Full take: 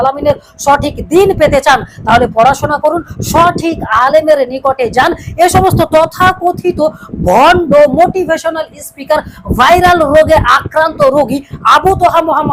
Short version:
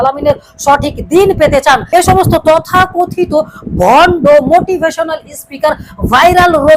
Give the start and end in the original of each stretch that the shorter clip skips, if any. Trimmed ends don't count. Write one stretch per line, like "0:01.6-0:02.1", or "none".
0:01.8-0:05.3